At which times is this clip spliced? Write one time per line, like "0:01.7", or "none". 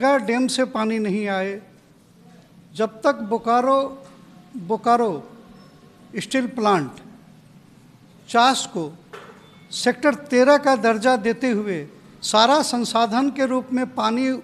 none